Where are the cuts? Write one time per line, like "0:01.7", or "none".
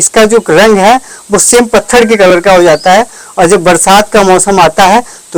none